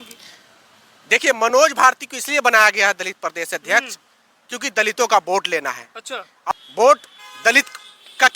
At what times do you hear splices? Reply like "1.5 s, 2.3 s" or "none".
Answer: 6.5 s

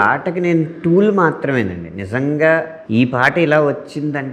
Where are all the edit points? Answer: 2.8 s

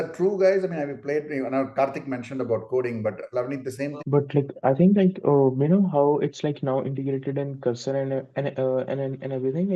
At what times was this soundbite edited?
4.0 s

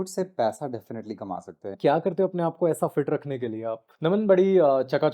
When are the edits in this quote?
1.8 s, 3.9 s

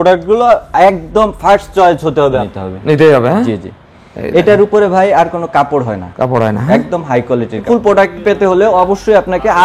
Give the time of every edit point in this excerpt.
2.5 s, 7.6 s

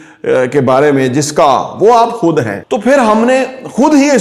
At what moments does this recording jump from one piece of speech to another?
2.6 s

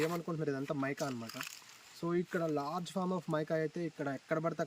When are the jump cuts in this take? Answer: none

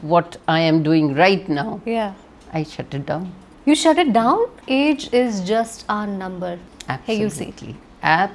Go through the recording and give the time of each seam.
3.5 s, 4.6 s, 6.7 s

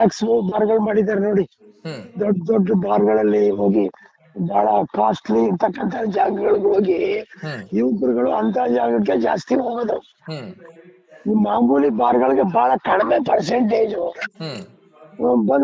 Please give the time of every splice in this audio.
none

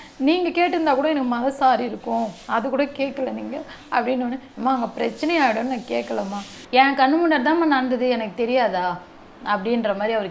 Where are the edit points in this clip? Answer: 6.5 s

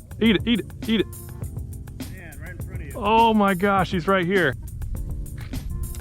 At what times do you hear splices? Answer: 4.6 s

